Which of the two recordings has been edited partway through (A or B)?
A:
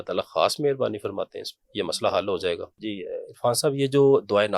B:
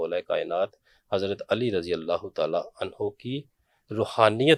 A